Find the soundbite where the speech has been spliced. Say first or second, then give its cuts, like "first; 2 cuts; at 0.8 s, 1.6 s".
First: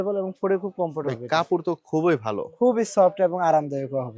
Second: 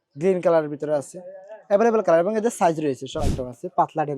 second; 1 cut; at 3.2 s